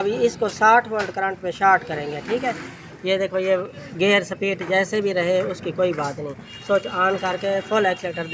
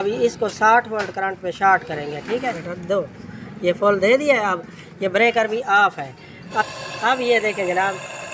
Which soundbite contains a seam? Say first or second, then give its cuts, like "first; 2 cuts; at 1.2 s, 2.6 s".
second; 2 cuts; at 2.7 s, 6.6 s